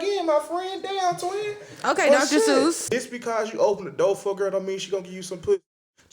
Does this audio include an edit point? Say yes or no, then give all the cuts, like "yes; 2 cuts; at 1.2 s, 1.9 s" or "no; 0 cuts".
yes; 1 cut; at 2.9 s